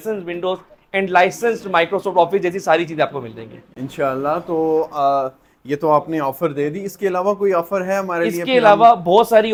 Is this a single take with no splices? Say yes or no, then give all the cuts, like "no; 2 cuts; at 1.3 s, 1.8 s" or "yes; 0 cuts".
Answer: yes; 0 cuts